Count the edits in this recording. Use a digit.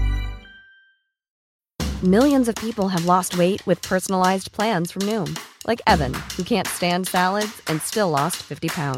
1